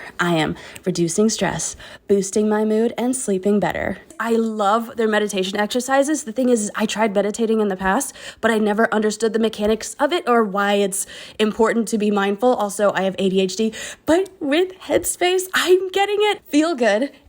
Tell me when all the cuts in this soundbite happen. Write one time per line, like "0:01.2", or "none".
0:04.2
0:16.4